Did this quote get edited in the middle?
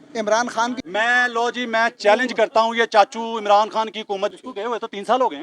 yes; 2 cuts; at 0.8 s, 4.3 s

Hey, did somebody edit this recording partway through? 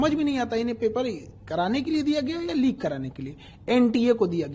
no; 0 cuts

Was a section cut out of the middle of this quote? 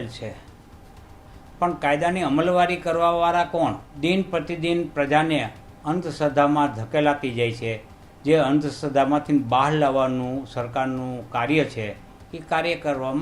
yes; 1 cut; at 3.9 s

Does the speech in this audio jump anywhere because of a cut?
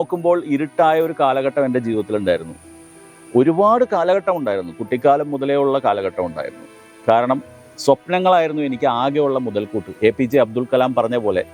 no; 0 cuts

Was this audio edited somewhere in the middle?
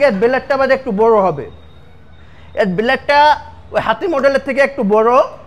no; 0 cuts

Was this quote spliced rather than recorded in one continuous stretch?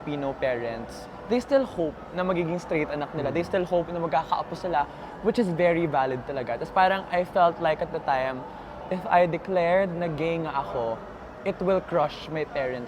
no; 0 cuts

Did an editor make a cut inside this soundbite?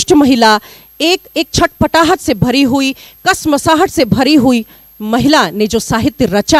no; 0 cuts

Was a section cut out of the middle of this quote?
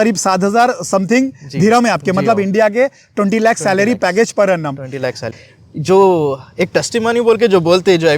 yes; 1 cut; at 5.3 s

